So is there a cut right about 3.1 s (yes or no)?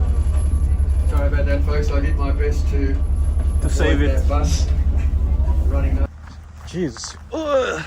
no